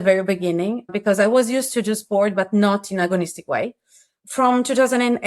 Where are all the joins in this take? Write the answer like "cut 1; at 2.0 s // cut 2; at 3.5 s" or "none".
cut 1; at 0.9 s // cut 2; at 4.1 s